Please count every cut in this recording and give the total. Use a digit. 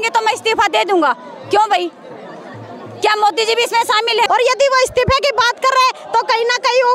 1